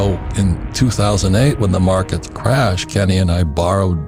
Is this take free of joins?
yes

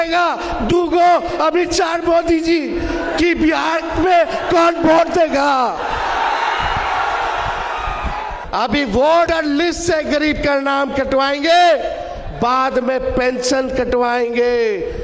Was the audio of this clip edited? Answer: yes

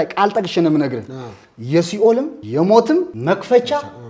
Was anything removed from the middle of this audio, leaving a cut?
yes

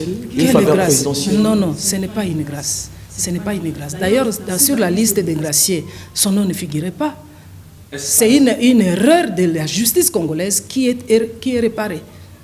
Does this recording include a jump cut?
no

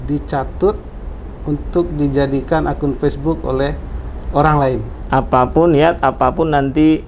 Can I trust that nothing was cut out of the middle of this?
no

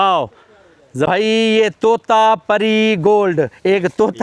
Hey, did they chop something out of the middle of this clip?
yes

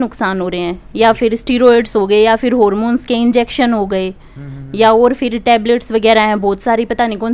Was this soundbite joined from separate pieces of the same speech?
no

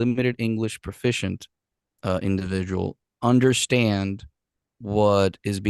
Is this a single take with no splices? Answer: yes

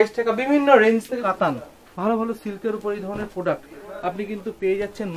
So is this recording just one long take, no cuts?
no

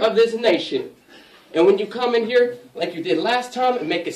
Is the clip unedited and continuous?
yes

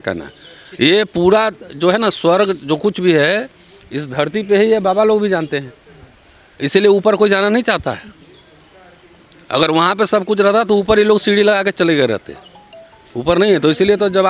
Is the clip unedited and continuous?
yes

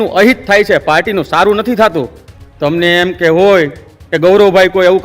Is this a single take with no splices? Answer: yes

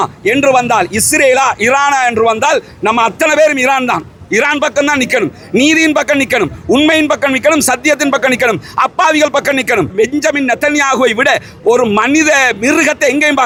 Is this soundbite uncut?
yes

